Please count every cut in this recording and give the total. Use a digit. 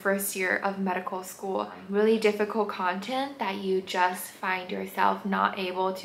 1